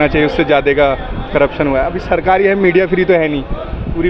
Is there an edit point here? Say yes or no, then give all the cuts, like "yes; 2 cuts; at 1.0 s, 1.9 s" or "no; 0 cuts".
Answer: no; 0 cuts